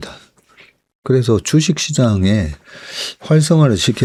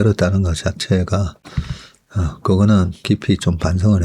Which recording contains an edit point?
second; 1 cut; at 3.0 s

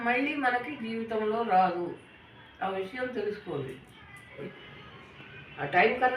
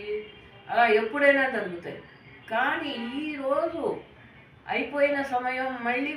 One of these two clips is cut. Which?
first; 1 cut; at 4.4 s

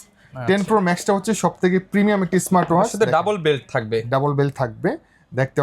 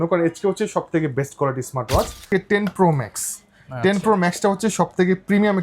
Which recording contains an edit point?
second; 1 cut; at 2.2 s

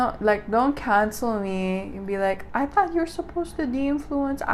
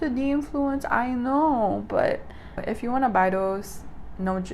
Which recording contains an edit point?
second; 1 cut; at 2.6 s

